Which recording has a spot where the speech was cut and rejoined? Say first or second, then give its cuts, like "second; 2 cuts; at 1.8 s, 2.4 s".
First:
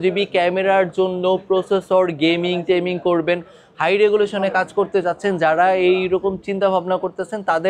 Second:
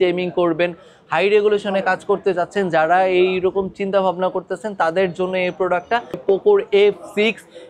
second; 1 cut; at 6.2 s